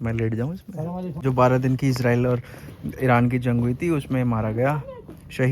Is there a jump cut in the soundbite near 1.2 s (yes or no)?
yes